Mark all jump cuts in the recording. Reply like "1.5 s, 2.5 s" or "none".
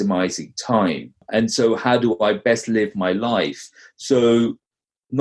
1.2 s